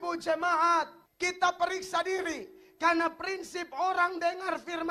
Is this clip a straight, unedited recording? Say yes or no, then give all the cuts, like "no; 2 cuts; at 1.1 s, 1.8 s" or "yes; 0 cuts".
yes; 0 cuts